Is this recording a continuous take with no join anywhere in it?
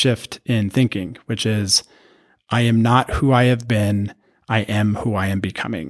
yes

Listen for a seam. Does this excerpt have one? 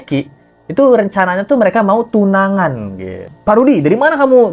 yes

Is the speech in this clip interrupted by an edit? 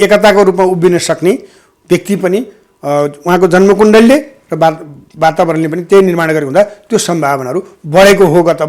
no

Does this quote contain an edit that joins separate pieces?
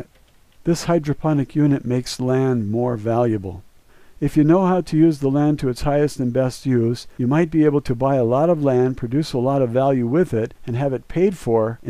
no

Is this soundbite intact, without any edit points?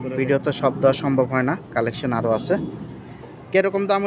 yes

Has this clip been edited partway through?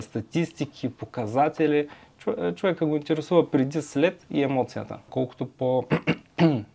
yes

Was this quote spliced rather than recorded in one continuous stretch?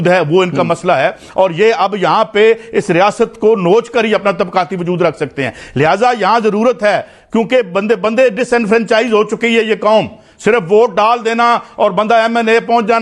no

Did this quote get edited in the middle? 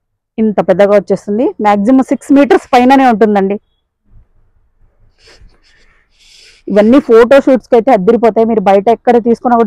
no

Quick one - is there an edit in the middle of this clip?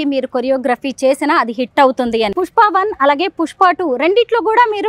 yes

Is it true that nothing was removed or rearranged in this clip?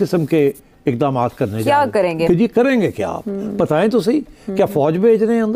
no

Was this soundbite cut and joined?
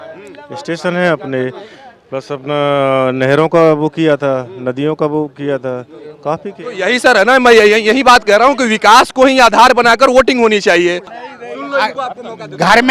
yes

